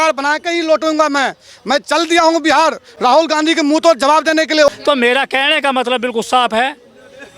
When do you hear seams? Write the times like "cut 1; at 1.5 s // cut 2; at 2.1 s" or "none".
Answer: cut 1; at 4.8 s